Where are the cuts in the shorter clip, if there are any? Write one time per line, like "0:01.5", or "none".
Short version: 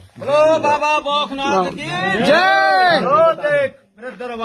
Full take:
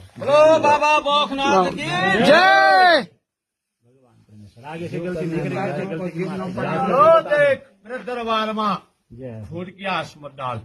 0:03.0